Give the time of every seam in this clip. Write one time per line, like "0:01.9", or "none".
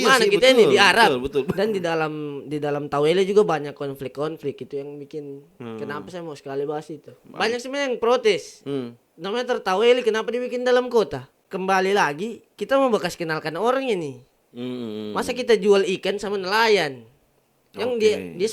0:01.5
0:07.2
0:11.3